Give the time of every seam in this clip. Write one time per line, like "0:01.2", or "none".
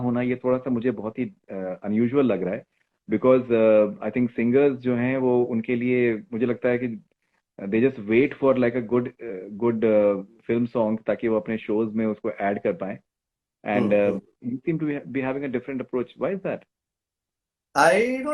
none